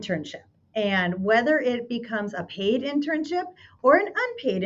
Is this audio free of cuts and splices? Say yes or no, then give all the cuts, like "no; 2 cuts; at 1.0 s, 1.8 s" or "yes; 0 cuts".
yes; 0 cuts